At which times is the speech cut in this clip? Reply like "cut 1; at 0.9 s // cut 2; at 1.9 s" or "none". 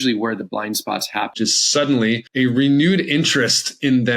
cut 1; at 1.3 s // cut 2; at 2.3 s